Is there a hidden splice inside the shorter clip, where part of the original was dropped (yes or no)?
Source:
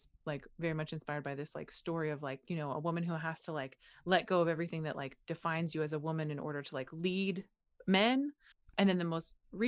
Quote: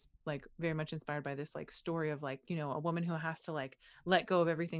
no